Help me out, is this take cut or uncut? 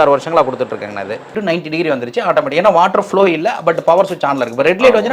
cut